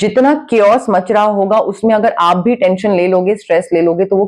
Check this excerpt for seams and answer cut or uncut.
uncut